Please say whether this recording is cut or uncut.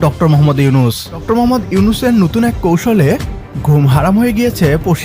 cut